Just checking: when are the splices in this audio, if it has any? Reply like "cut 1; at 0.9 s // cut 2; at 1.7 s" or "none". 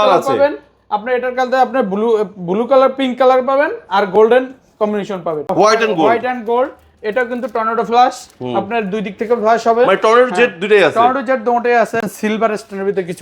cut 1; at 5.5 s // cut 2; at 12.1 s